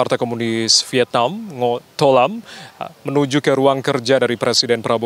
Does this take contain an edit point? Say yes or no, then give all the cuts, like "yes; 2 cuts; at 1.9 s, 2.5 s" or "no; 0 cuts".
no; 0 cuts